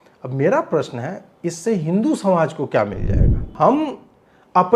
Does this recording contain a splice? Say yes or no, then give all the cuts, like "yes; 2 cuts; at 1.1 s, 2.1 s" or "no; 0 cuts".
yes; 1 cut; at 3.5 s